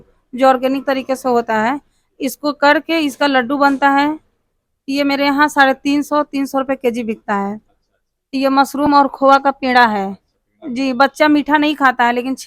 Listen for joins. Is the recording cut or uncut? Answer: uncut